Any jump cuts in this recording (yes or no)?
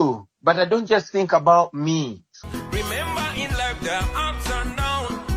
yes